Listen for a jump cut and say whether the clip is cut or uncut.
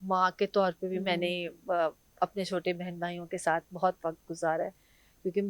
uncut